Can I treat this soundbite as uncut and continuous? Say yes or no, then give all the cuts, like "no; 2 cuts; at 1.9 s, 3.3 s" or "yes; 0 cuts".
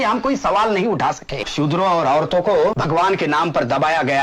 no; 2 cuts; at 1.5 s, 2.8 s